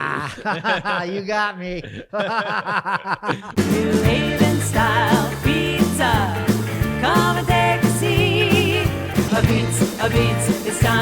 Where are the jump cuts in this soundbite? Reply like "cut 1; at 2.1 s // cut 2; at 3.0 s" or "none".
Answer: cut 1; at 3.4 s